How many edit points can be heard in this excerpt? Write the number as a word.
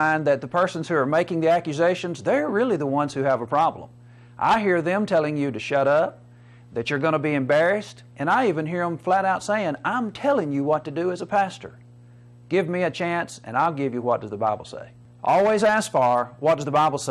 zero